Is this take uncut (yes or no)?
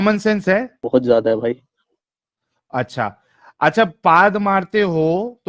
yes